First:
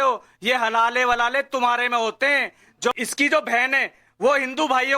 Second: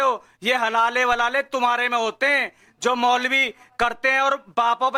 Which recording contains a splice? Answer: first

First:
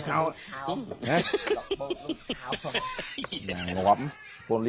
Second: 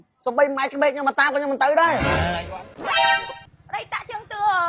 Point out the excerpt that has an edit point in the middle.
second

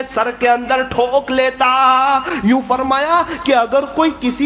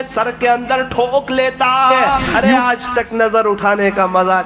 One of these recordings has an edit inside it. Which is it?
second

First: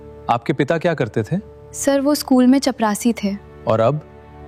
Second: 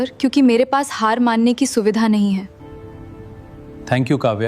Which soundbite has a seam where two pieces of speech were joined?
second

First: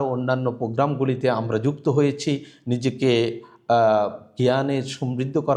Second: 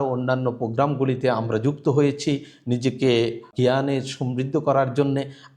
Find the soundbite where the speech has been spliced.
second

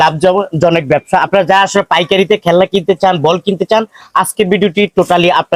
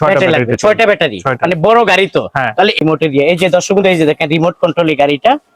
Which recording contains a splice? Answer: second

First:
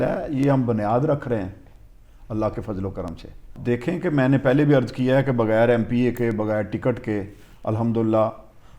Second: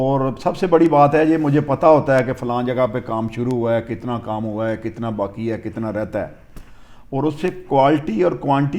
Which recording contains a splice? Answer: first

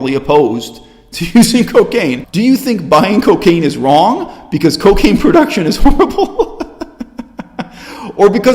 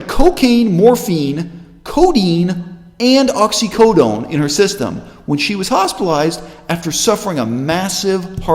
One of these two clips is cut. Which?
first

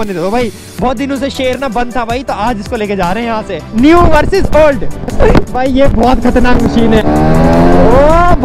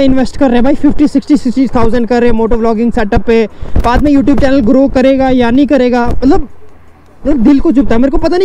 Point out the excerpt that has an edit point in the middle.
first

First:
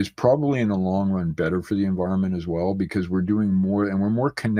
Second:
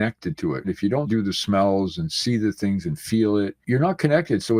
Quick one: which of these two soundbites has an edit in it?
second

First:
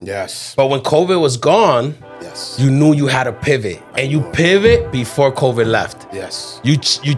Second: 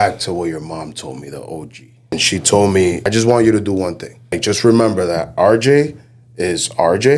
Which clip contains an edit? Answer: second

